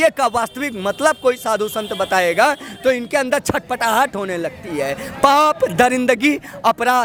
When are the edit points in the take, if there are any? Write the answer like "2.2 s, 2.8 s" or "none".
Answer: none